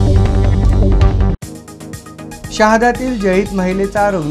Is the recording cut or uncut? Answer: cut